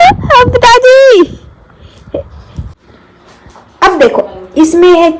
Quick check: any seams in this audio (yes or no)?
yes